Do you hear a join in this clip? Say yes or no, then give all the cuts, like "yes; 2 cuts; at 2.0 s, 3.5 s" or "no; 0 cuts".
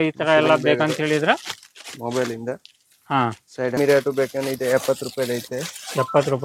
yes; 1 cut; at 3.8 s